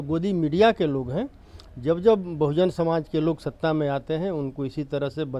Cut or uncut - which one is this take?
uncut